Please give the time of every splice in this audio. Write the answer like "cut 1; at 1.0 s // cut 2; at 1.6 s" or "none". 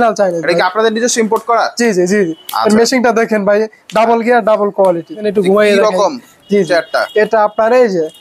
cut 1; at 5.3 s